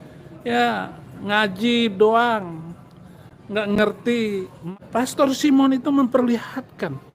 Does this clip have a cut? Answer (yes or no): yes